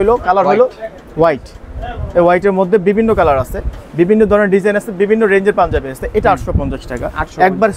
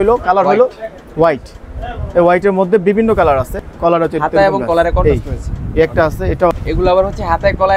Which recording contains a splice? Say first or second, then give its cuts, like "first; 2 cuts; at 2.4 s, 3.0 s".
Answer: second; 2 cuts; at 3.6 s, 6.5 s